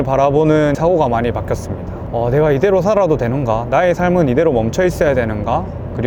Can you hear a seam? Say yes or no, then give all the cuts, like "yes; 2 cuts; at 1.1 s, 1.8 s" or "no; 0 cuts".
no; 0 cuts